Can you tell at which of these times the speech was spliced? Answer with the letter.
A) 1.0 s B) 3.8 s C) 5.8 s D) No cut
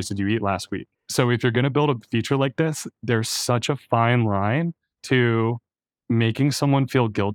A